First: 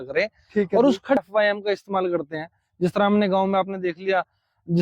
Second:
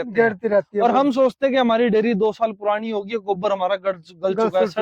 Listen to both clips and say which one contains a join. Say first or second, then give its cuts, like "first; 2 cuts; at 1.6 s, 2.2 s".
first; 1 cut; at 1.2 s